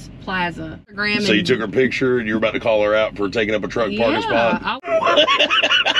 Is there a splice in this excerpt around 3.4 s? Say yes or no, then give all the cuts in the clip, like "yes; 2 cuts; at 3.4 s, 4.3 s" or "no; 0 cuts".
no; 2 cuts; at 1.0 s, 4.7 s